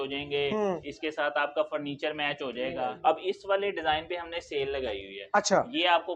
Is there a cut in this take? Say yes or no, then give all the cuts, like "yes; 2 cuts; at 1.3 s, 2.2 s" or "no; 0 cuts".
yes; 1 cut; at 2.8 s